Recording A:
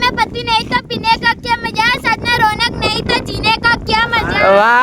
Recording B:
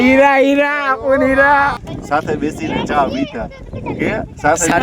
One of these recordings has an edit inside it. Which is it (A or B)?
B